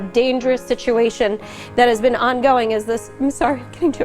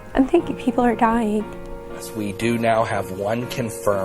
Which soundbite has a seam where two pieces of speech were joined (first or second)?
second